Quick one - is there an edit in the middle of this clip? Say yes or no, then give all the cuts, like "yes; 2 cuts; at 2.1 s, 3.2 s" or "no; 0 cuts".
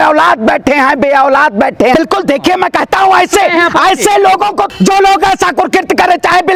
yes; 1 cut; at 1.9 s